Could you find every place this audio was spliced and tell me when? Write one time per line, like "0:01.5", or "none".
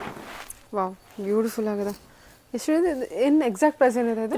none